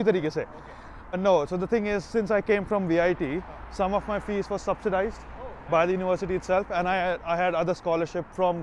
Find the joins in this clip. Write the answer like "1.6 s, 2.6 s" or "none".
1.2 s